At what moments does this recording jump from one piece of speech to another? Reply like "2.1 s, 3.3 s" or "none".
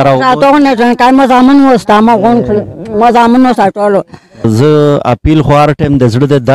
4.5 s